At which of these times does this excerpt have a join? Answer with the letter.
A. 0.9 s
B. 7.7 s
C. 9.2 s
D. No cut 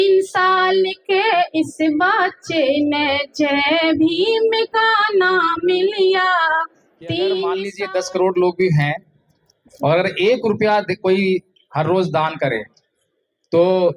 B